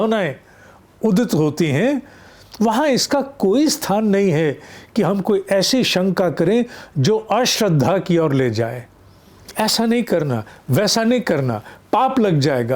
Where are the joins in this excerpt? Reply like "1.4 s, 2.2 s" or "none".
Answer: 9.5 s